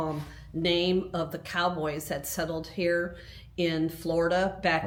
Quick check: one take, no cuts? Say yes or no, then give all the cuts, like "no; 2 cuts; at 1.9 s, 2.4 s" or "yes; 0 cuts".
yes; 0 cuts